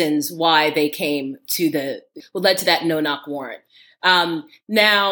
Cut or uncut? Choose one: cut